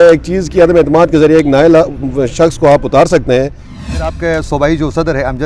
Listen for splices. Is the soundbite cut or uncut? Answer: cut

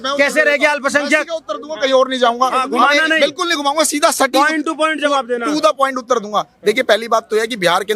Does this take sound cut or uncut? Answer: uncut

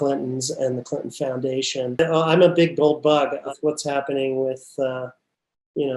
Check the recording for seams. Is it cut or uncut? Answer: cut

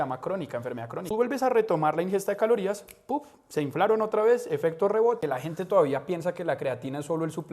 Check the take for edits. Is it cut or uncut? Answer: cut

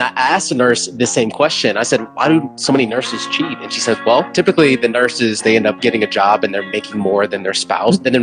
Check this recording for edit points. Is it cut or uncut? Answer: uncut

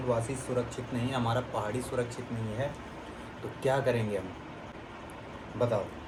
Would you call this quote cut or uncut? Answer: uncut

